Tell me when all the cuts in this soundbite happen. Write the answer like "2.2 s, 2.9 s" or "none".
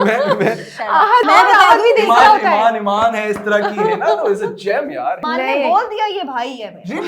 1.2 s, 5.2 s